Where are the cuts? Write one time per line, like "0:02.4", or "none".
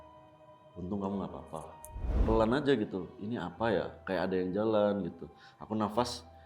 0:02.1